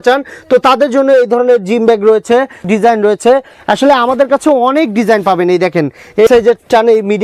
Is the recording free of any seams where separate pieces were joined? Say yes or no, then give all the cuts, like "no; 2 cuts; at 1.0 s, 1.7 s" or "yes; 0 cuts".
no; 2 cuts; at 2.6 s, 6.3 s